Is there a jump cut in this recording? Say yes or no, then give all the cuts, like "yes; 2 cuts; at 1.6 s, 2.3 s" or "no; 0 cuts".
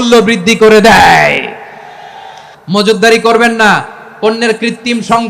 yes; 1 cut; at 2.5 s